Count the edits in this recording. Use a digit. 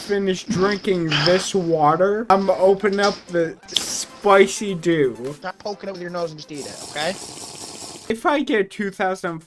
1